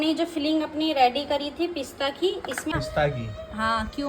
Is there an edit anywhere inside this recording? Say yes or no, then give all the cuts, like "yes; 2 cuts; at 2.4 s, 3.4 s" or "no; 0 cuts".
yes; 1 cut; at 2.7 s